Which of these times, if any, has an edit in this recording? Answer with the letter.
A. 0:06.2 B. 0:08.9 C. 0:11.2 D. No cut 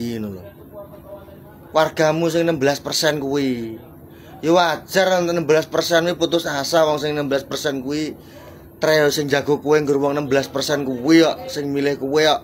D